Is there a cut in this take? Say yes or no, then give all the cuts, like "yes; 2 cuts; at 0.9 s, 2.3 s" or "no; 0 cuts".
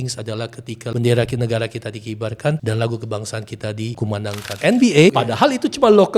yes; 4 cuts; at 0.9 s, 2.6 s, 4.2 s, 5.1 s